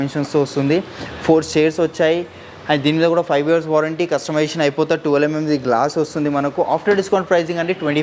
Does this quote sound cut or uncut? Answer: uncut